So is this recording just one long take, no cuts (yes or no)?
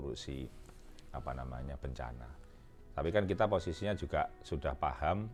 yes